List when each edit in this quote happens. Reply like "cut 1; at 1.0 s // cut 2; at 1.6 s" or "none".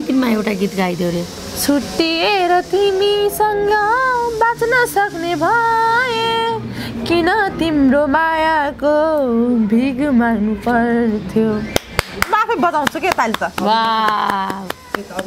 none